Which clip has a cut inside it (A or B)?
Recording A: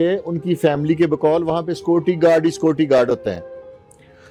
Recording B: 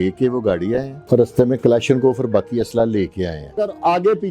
B